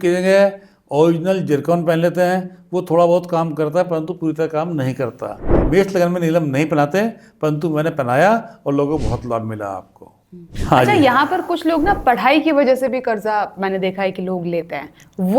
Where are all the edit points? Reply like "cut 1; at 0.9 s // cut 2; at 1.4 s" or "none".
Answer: cut 1; at 5.5 s // cut 2; at 10.4 s